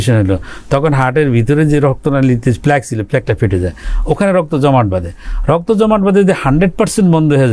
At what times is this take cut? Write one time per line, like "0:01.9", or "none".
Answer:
none